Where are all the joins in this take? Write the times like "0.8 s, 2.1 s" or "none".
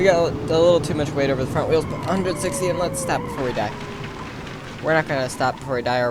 none